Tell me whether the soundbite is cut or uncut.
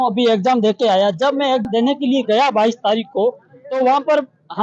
cut